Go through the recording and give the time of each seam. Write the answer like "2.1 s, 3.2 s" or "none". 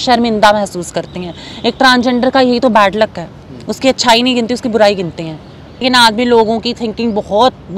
5.8 s